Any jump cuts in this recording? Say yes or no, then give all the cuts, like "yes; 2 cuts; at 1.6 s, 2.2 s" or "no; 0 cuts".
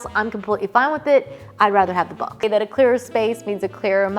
yes; 1 cut; at 2.4 s